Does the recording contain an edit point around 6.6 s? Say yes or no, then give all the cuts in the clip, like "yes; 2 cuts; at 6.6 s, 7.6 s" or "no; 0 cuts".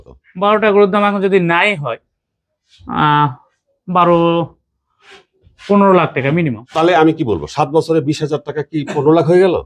yes; 1 cut; at 6.6 s